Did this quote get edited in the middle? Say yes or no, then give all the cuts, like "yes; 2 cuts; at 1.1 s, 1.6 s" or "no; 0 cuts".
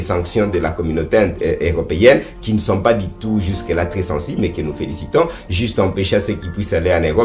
no; 0 cuts